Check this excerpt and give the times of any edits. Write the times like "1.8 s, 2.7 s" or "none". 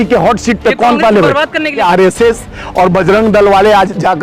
1.8 s